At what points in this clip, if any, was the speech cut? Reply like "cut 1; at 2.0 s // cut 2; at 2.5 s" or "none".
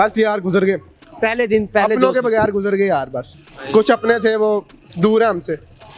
none